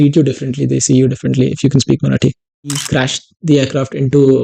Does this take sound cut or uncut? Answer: cut